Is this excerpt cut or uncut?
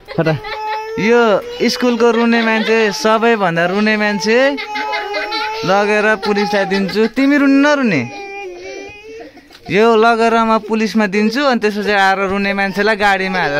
uncut